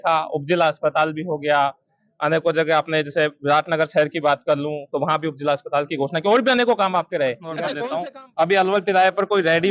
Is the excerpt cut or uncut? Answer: cut